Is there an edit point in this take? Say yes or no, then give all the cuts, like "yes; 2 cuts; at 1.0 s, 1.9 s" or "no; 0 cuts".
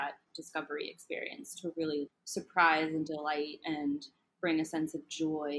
yes; 1 cut; at 2.1 s